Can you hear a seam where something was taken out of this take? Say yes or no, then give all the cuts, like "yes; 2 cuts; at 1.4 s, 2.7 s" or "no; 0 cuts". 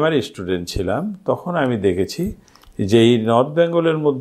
no; 0 cuts